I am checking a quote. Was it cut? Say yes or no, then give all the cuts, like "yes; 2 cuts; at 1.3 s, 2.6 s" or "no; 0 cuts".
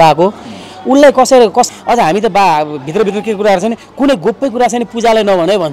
yes; 1 cut; at 1.7 s